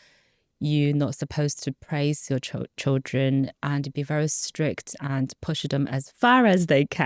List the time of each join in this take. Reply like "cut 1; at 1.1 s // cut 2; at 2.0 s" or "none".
cut 1; at 6.1 s